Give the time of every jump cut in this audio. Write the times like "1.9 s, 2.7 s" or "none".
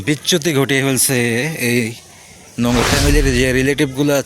2.8 s